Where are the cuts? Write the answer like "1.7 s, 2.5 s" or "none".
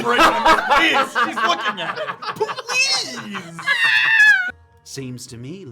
4.5 s